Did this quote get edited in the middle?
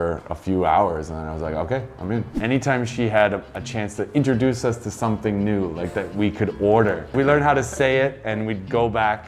yes; 2 cuts; at 2.4 s, 7.1 s

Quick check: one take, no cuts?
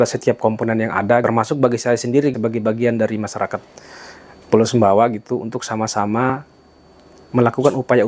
no; 2 cuts; at 1.2 s, 2.3 s

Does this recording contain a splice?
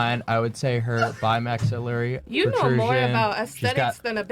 no; 0 cuts

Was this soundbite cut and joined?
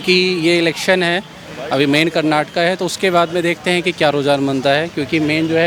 no; 0 cuts

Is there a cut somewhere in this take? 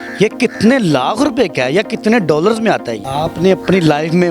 yes; 1 cut; at 3.0 s

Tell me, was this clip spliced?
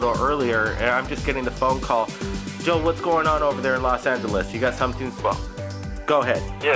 yes; 1 cut; at 1.4 s

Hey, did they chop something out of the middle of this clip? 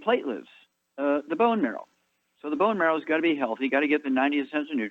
yes; 1 cut; at 3.5 s

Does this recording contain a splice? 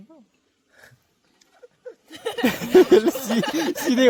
no; 0 cuts

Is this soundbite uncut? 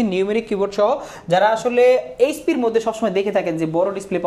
yes; 0 cuts

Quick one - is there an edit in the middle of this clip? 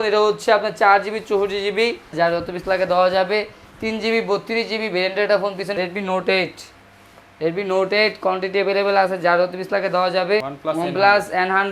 yes; 3 cuts; at 2.1 s, 5.7 s, 10.5 s

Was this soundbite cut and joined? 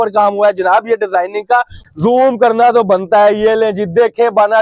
yes; 1 cut; at 1.7 s

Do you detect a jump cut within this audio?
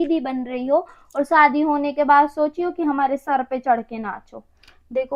no; 0 cuts

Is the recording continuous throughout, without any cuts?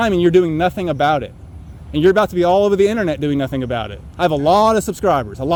yes; 0 cuts

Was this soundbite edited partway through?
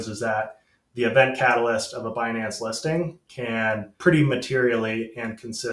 yes; 1 cut; at 3.9 s

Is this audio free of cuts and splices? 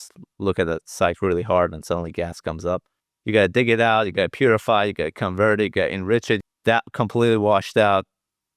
no; 1 cut; at 6.4 s

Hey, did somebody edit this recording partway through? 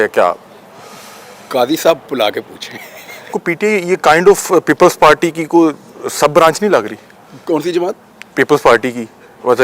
yes; 1 cut; at 3.4 s

